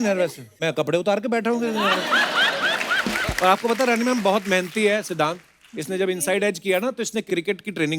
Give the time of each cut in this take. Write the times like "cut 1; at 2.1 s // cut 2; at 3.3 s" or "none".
cut 1; at 3.2 s